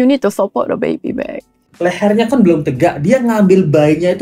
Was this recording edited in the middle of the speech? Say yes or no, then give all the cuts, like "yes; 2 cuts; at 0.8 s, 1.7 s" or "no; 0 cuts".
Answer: yes; 1 cut; at 1.6 s